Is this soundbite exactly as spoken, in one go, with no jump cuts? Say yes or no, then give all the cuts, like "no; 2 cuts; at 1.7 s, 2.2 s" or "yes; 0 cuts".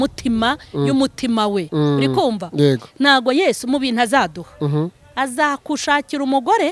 yes; 0 cuts